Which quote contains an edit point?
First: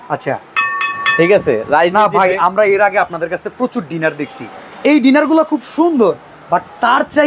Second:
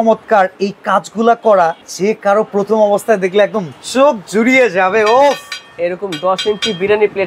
second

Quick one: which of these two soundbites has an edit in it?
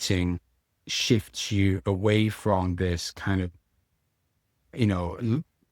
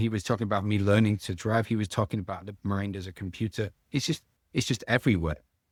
first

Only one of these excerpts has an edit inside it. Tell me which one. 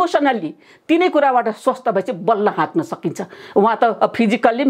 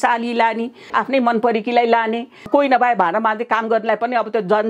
second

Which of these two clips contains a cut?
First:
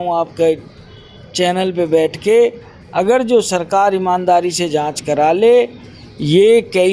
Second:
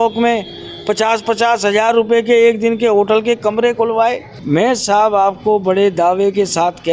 second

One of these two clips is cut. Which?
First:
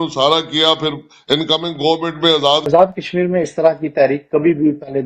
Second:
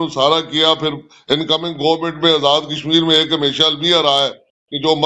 first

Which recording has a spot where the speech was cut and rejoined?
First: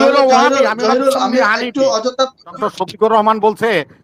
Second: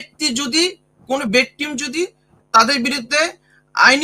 first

